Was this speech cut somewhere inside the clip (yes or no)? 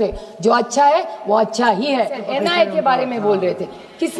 yes